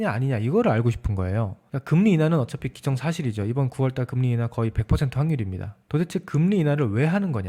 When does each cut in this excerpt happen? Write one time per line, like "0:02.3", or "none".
0:05.7